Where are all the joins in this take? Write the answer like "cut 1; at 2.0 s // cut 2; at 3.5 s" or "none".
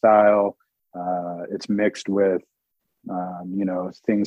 none